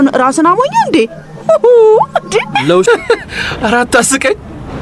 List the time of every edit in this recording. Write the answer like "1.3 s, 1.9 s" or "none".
2.8 s

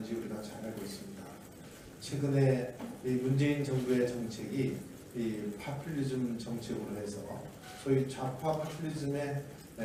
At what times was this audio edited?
none

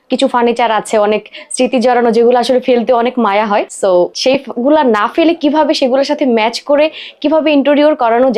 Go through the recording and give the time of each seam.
4.0 s

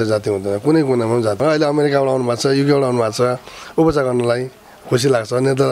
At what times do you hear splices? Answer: 1.4 s

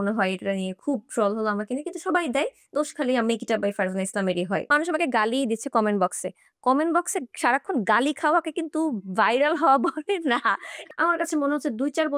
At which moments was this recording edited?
4.6 s, 10.7 s

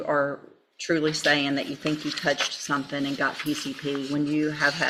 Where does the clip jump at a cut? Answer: none

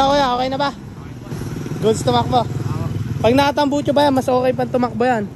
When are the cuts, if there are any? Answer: none

